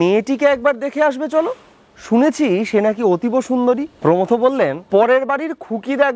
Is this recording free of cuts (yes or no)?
no